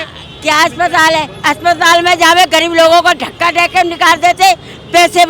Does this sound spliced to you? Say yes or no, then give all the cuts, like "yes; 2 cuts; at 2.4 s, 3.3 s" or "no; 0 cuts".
no; 0 cuts